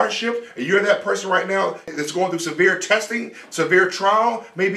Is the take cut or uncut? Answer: cut